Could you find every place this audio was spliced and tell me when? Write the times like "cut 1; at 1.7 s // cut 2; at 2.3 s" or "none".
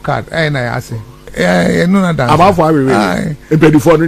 cut 1; at 1.3 s

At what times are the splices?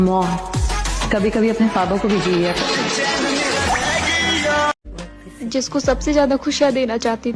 cut 1; at 4.9 s

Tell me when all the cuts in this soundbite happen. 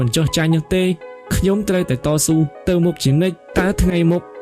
cut 1; at 3.4 s

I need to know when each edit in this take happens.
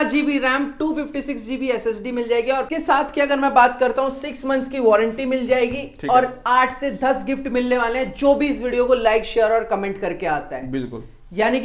cut 1; at 2.7 s

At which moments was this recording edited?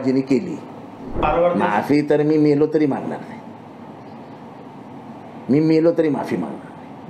cut 1; at 1.2 s

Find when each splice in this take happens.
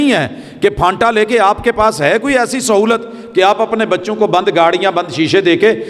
none

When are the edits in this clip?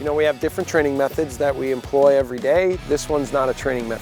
none

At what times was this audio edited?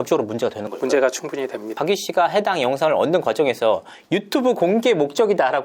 cut 1; at 1.8 s

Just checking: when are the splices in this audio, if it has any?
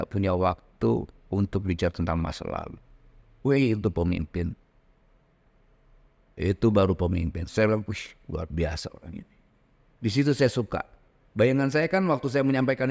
none

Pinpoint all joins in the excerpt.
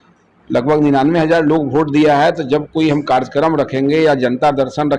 none

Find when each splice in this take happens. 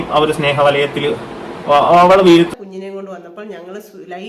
cut 1; at 2.5 s

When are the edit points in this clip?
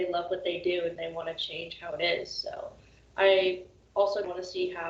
none

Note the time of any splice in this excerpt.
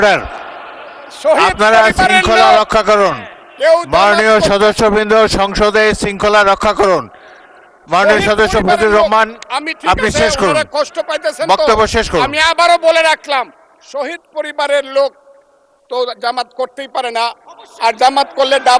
none

